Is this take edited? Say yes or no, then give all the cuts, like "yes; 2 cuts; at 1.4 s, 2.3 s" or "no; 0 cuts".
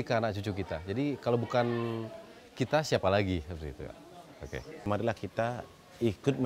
yes; 1 cut; at 4.9 s